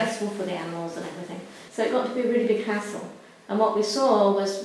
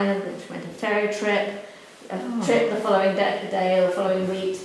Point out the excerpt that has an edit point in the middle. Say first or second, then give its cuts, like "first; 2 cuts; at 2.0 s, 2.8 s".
first; 1 cut; at 1.6 s